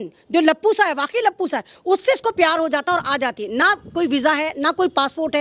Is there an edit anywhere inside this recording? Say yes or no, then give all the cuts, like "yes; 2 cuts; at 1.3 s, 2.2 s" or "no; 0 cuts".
no; 0 cuts